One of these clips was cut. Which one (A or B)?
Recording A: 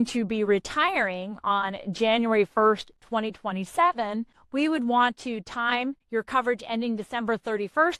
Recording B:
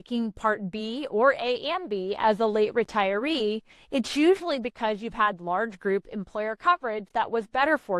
A